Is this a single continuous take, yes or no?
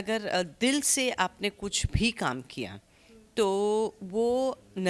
yes